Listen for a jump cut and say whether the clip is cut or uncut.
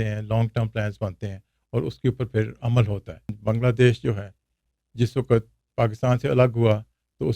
cut